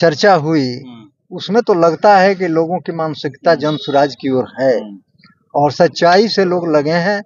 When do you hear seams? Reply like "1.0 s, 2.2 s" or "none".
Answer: none